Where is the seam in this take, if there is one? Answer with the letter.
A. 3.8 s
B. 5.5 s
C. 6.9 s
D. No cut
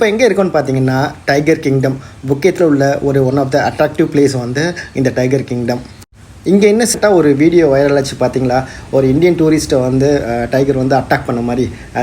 C